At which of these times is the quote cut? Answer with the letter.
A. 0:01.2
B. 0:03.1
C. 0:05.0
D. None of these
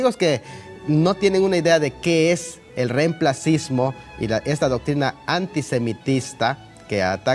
C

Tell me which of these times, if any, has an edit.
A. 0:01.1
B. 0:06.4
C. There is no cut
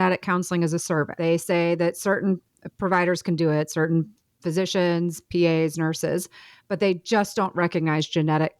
A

